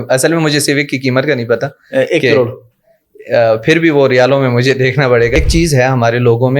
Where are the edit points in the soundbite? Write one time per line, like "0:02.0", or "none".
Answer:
0:05.3